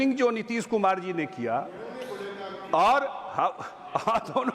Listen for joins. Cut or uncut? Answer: uncut